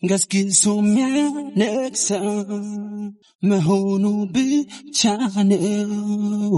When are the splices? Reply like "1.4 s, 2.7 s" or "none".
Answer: none